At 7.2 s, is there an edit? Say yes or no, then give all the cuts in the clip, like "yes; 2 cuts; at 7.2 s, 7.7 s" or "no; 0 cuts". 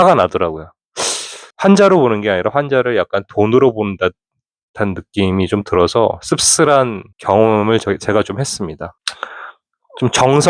no; 1 cut; at 1.5 s